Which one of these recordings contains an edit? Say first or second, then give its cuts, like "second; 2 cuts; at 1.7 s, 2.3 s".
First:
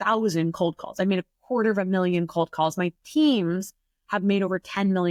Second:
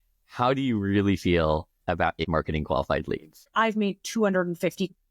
second; 2 cuts; at 2.2 s, 3.4 s